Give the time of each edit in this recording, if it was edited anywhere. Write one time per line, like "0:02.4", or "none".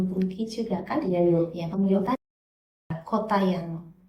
none